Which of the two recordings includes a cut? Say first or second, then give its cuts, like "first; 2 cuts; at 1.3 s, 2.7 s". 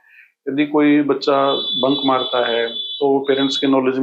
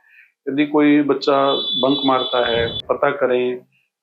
second; 1 cut; at 2.8 s